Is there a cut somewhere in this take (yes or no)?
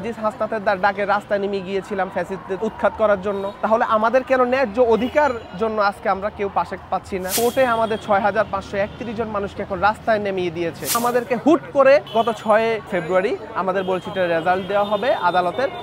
yes